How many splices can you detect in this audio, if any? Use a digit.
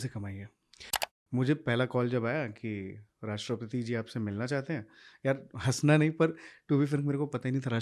1